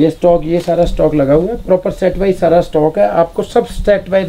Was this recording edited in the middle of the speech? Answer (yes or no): no